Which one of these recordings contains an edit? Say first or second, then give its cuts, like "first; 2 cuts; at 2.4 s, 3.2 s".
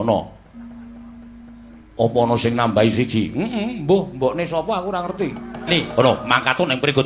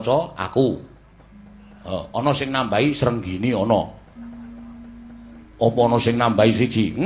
first; 1 cut; at 5.7 s